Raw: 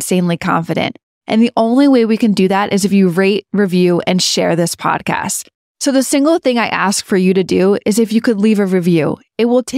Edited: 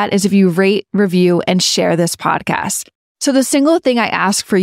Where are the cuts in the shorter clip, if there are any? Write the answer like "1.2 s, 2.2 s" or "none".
none